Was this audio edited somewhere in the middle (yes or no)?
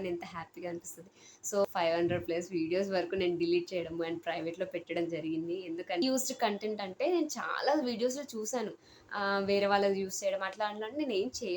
yes